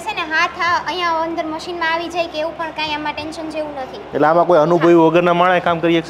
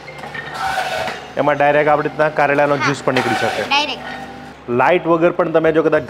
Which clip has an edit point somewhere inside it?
second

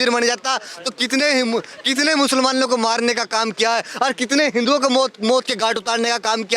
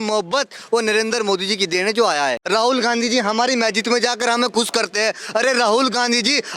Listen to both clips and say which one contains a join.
second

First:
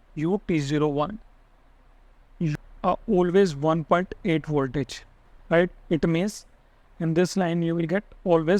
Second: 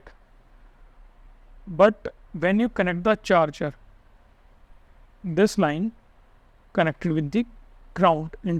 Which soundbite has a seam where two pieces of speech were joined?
first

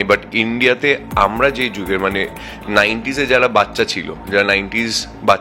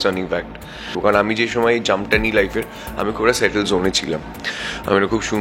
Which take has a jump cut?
second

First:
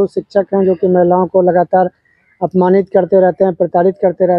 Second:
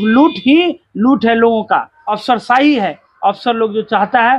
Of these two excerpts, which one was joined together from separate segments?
second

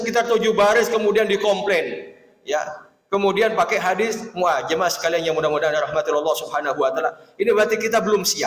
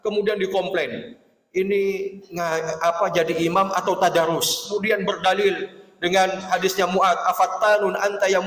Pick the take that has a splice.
second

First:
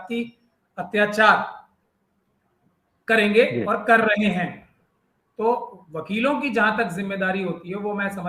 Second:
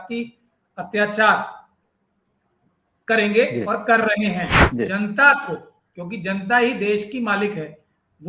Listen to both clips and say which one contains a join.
second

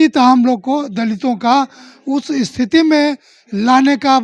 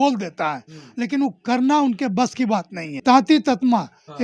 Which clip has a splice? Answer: second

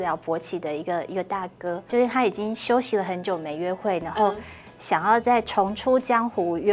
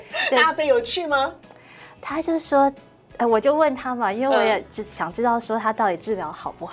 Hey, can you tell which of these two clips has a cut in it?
first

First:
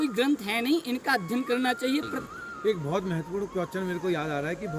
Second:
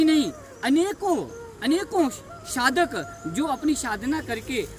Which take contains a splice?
first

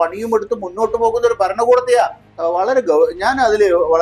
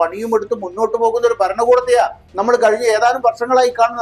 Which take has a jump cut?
first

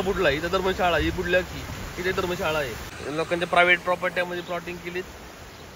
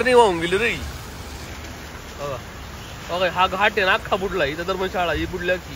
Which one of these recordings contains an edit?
first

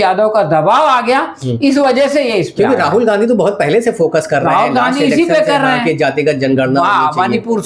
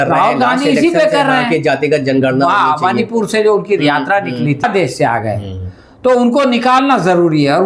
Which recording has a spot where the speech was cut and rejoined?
second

